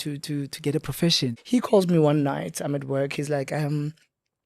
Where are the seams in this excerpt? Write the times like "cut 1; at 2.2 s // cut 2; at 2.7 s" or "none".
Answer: cut 1; at 1.4 s